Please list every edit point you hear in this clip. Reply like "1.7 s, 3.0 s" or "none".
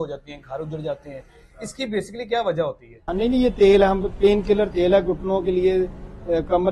2.9 s